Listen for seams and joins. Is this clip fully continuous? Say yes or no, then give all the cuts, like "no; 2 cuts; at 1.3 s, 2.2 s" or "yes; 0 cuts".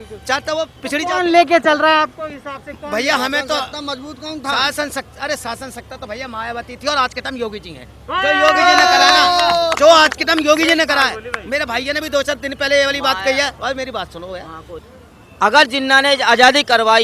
no; 1 cut; at 14.8 s